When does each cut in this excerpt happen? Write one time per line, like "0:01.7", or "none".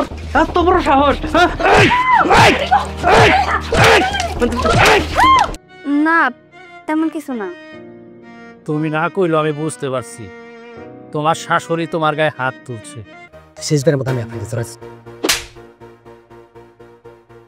0:05.6
0:13.3

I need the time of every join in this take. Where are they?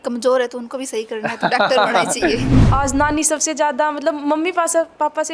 0:02.6

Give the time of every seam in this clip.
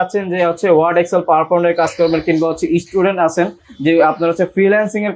none

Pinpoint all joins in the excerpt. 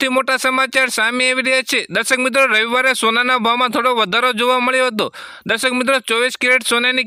none

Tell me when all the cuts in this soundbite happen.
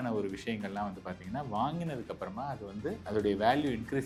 none

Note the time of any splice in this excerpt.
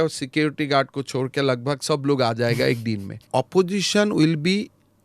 0:03.2

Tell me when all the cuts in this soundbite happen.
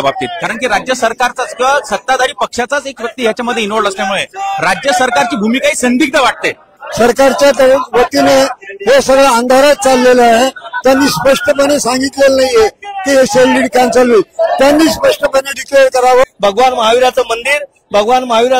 0:06.8
0:16.2

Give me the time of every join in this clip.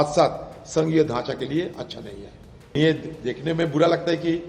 0:02.7

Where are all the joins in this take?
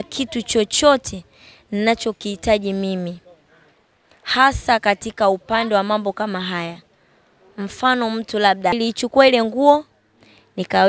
0:08.8

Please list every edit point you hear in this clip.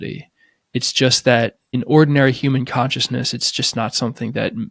0:01.8

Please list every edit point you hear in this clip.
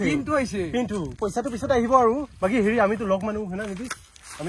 0:01.2

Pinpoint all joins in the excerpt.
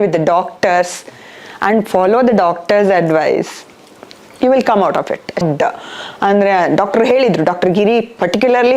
0:05.4

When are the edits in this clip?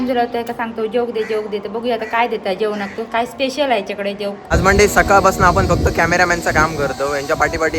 0:04.5

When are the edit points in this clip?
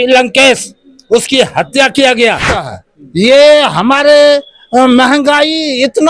0:02.6

